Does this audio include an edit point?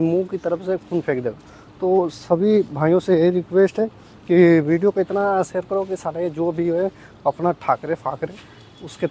no; 0 cuts

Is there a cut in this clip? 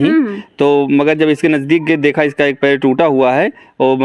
no; 0 cuts

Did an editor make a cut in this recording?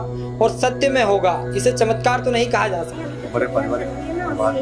yes; 1 cut; at 2.9 s

